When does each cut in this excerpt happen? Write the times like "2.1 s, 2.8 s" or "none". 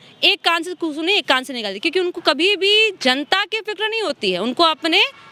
none